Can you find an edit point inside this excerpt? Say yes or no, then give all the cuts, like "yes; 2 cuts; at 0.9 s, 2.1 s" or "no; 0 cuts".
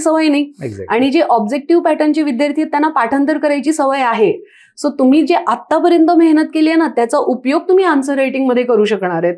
no; 0 cuts